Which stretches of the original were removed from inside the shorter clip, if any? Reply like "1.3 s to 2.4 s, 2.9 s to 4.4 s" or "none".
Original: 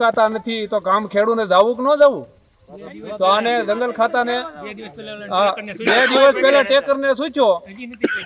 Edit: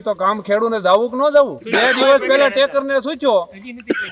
2.3 s to 5.7 s